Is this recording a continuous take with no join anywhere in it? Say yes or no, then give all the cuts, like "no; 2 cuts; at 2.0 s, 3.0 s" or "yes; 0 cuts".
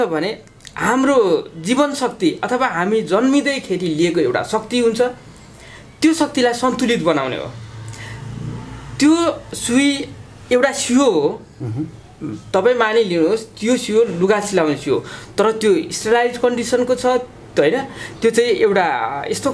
yes; 0 cuts